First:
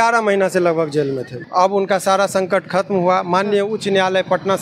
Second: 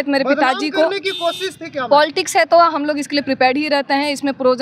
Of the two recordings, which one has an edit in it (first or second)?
first